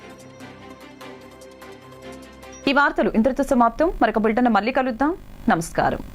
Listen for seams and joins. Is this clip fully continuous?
yes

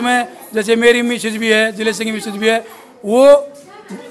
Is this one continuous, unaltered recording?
yes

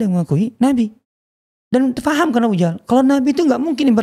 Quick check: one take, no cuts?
yes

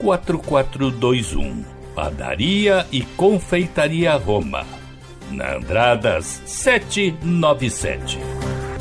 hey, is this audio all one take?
no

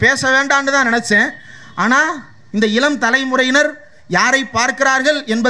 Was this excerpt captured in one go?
yes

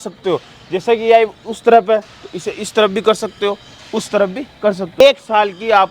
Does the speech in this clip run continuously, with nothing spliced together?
no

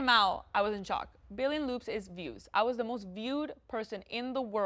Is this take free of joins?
yes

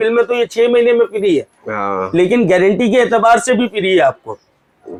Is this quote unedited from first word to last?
yes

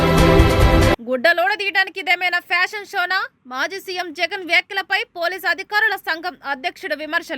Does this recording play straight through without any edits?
no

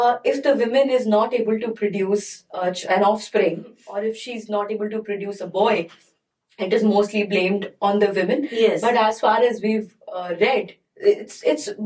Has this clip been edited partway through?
yes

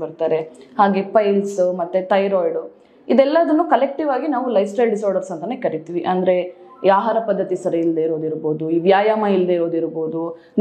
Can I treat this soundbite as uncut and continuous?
yes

